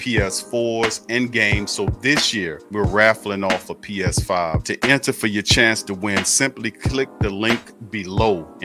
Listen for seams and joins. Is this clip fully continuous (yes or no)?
yes